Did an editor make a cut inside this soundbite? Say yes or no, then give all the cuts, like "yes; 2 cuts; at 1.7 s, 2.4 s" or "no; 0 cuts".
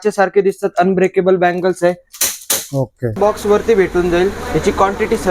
yes; 1 cut; at 3.2 s